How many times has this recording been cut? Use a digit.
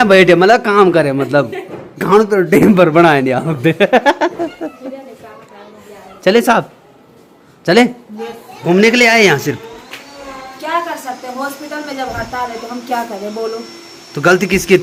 0